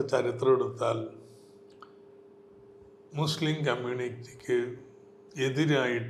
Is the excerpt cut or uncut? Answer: uncut